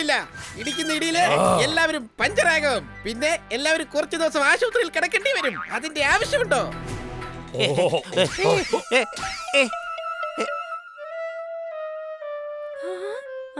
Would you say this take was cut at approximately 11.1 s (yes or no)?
no